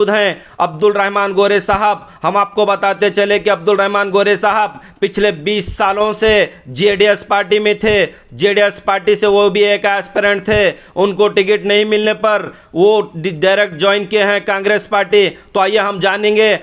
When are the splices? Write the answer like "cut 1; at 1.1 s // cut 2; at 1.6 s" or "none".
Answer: none